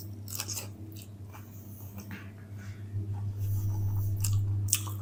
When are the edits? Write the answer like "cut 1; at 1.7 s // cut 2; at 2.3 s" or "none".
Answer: none